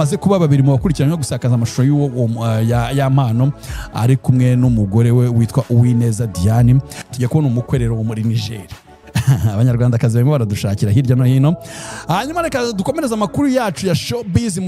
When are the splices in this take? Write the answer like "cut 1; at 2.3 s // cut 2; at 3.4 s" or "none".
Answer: cut 1; at 7.0 s